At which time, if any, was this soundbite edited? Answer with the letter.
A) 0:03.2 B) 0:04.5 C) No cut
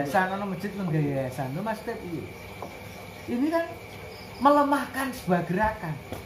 C